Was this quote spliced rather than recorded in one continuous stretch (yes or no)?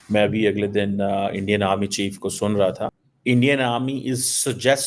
yes